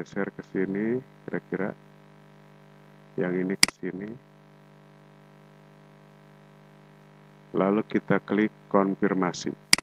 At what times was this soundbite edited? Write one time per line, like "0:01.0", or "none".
none